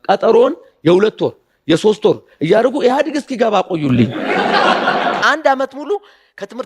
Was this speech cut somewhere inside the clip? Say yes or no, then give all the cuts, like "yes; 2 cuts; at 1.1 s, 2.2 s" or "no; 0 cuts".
yes; 1 cut; at 5.2 s